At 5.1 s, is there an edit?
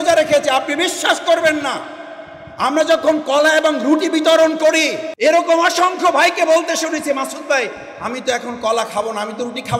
yes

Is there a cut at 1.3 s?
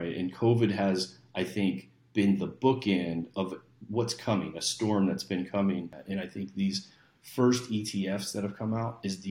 no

